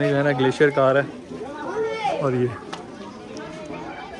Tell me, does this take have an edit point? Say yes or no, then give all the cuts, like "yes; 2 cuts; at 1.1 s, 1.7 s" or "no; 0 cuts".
no; 0 cuts